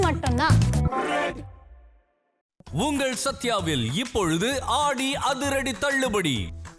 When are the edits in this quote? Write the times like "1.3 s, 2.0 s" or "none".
none